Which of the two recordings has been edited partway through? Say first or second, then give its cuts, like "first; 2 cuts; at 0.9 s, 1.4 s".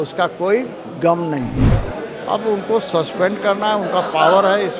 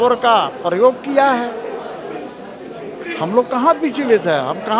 first; 1 cut; at 1.7 s